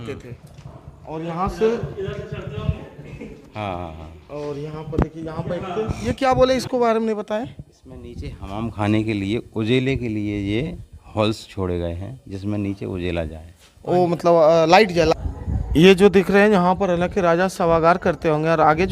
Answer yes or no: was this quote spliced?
yes